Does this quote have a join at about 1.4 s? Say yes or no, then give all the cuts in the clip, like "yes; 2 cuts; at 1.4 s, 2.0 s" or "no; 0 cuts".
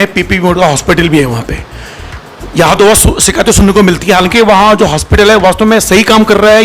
no; 1 cut; at 4.3 s